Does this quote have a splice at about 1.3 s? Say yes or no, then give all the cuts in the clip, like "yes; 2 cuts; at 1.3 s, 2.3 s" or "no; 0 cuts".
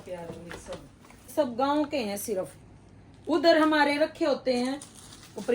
yes; 1 cut; at 1.3 s